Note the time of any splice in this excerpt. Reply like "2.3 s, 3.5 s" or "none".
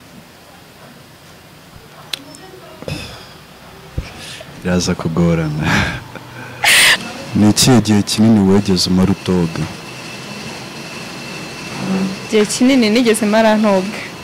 7.0 s